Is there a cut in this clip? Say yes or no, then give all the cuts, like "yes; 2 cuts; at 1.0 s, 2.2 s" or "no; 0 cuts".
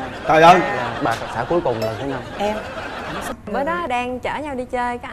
yes; 1 cut; at 3.3 s